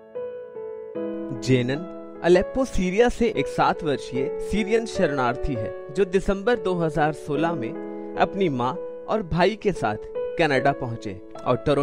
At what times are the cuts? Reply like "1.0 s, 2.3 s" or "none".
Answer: 1.1 s